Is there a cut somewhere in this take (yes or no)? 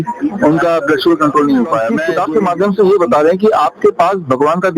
yes